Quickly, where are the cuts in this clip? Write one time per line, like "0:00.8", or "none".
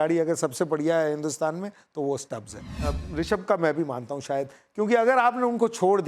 0:02.9